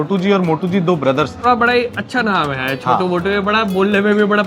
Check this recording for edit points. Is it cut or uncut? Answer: cut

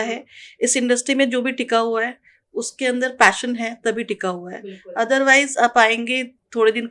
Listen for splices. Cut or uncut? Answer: uncut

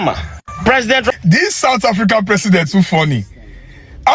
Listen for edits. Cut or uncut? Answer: cut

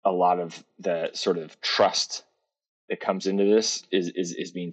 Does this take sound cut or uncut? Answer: uncut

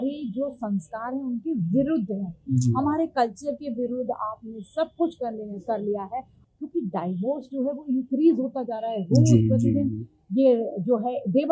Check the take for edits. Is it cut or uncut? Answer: cut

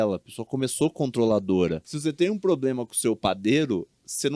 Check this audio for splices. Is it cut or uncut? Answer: cut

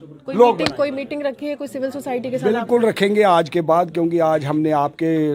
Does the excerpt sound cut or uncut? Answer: uncut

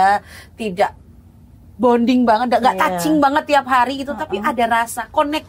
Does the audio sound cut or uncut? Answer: uncut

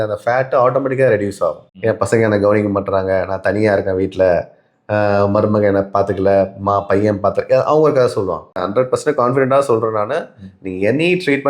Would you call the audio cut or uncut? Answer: cut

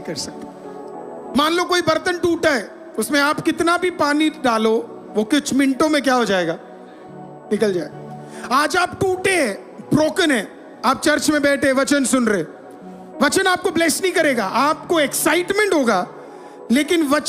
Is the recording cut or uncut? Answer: uncut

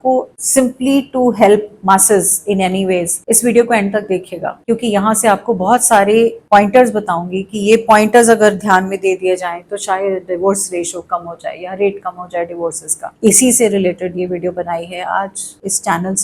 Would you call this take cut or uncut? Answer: uncut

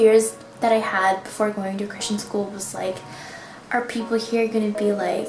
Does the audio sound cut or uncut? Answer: uncut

